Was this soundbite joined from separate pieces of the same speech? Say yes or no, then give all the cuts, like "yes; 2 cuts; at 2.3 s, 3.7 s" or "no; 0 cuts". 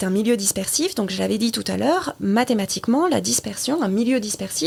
no; 0 cuts